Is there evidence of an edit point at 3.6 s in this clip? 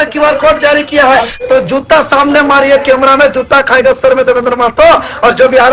no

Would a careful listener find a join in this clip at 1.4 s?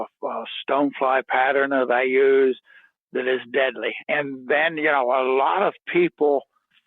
no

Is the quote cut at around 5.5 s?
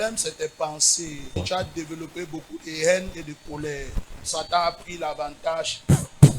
no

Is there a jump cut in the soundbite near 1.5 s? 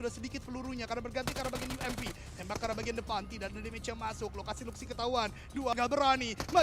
no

